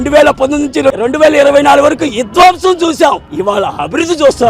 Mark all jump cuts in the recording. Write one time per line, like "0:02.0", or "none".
0:01.0